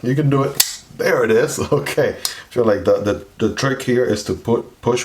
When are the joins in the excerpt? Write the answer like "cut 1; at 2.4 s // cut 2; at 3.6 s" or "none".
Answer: none